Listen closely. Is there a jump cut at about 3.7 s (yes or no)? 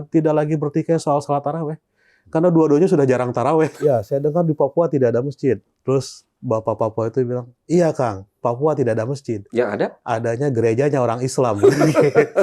yes